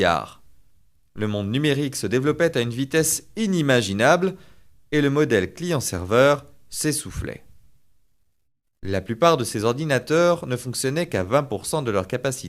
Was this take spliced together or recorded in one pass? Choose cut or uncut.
cut